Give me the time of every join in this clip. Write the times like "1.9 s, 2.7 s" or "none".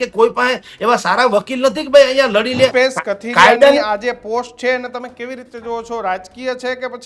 2.7 s